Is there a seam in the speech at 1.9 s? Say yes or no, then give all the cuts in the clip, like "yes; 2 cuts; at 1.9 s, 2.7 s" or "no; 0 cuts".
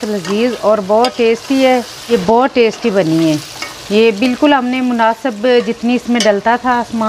yes; 1 cut; at 1.9 s